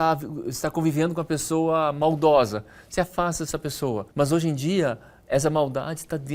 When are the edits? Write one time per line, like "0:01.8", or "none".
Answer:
0:04.1